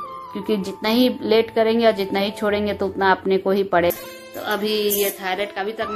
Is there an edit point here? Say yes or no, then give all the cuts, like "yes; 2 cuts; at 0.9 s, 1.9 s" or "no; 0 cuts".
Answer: yes; 1 cut; at 3.9 s